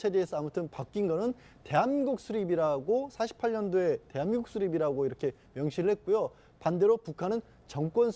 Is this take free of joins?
no; 1 cut; at 6.6 s

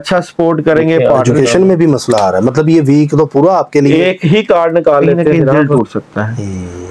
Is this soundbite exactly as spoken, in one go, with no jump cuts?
no; 2 cuts; at 1.0 s, 5.5 s

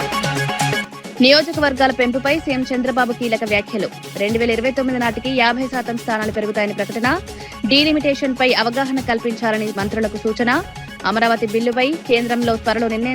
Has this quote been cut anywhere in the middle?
no; 0 cuts

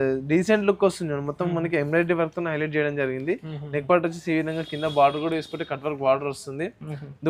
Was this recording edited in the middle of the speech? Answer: no; 0 cuts

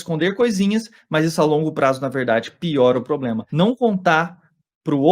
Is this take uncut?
no; 1 cut; at 3.4 s

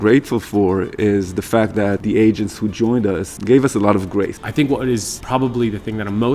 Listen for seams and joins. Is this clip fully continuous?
no; 4 cuts; at 2.0 s, 3.3 s, 4.4 s, 5.1 s

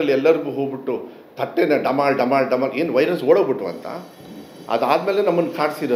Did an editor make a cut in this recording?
no; 0 cuts

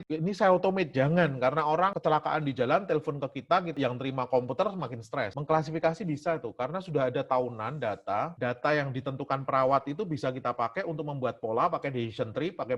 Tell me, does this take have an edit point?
yes; 2 cuts; at 2.0 s, 5.3 s

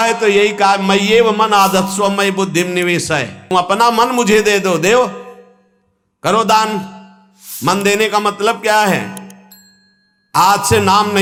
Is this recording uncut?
yes; 0 cuts

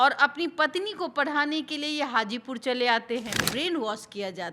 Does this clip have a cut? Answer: yes; 1 cut; at 3.4 s

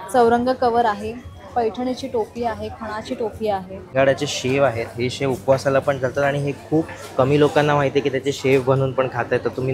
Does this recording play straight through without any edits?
no; 1 cut; at 3.9 s

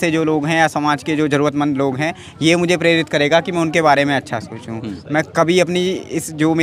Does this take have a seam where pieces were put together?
no; 0 cuts

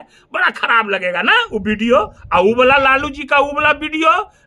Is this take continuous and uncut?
yes; 0 cuts

